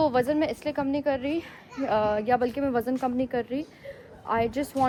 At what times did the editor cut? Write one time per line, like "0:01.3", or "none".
none